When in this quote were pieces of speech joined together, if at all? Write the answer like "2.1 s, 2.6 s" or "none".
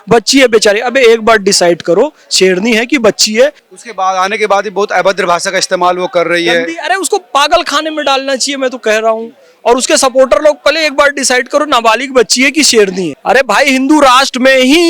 3.6 s, 13.2 s